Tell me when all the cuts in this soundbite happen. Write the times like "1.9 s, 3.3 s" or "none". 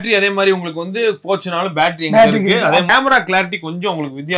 2.9 s